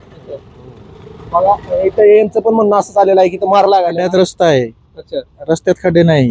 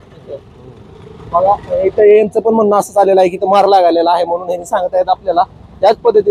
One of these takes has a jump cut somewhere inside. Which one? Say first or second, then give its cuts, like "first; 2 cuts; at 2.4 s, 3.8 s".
first; 1 cut; at 4.0 s